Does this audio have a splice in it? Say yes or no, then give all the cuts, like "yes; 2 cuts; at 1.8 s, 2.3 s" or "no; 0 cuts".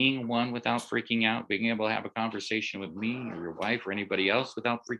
no; 0 cuts